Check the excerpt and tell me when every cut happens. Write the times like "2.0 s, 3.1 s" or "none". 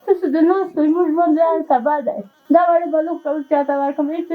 2.3 s

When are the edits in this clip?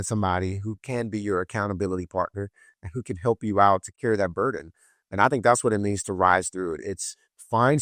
3.9 s

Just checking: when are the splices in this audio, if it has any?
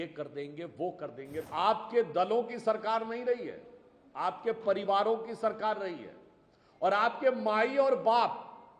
1.4 s

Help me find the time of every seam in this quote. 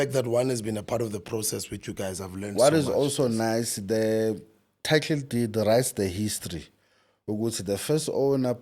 2.5 s

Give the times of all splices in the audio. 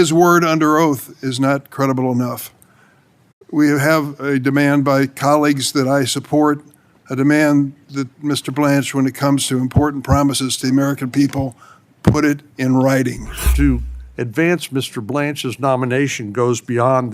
13.5 s

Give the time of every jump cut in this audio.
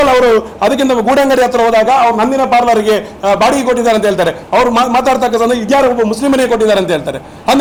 none

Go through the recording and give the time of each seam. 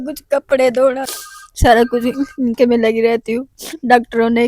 1.1 s

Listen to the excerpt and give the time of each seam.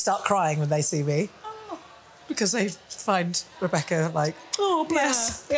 none

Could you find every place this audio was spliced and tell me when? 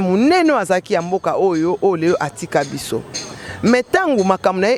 none

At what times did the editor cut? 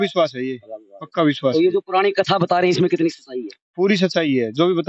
none

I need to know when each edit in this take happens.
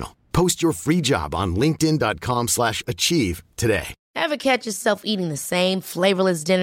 4.0 s

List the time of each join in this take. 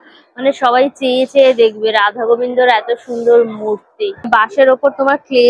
4.0 s

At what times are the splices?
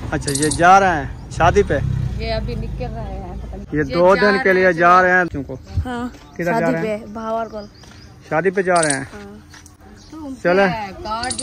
3.6 s, 5.3 s

